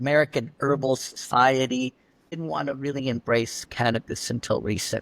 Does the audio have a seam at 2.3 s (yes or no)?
yes